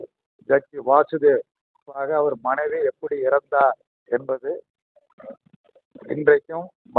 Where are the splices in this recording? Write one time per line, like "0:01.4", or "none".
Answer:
0:01.9